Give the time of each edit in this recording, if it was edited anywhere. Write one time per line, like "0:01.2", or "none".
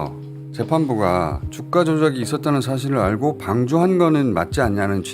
0:01.5